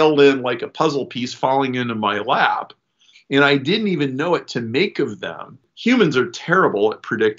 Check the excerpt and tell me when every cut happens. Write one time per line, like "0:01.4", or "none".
0:05.7